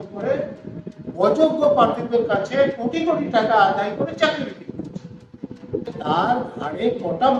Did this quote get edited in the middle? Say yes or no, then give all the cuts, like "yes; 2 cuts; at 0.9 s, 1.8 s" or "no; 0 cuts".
yes; 1 cut; at 5.9 s